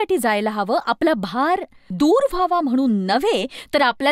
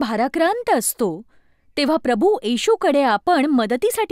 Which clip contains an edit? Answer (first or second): first